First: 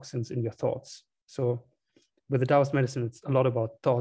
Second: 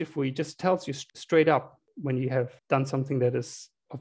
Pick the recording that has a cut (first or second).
second